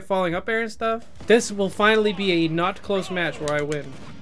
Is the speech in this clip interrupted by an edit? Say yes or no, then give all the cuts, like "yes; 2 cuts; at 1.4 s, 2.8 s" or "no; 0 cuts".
yes; 1 cut; at 1.1 s